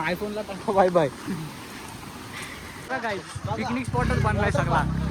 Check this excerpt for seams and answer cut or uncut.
cut